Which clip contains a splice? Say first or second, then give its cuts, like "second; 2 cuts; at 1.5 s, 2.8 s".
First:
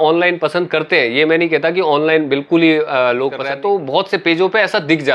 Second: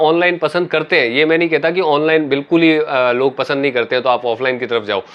first; 1 cut; at 3.4 s